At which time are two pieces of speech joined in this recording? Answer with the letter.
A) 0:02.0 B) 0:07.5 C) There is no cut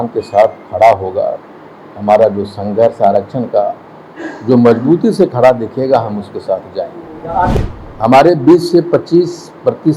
B